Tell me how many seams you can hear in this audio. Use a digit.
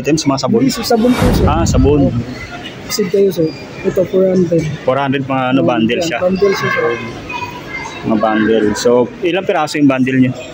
1